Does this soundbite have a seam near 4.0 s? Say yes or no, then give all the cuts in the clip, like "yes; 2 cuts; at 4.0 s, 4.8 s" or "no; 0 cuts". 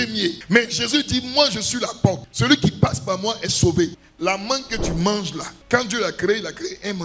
yes; 1 cut; at 4.0 s